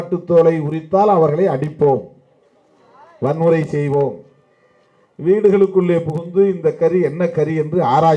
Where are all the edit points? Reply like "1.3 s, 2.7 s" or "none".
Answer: none